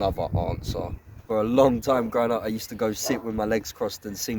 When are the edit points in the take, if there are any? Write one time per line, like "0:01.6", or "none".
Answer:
0:01.2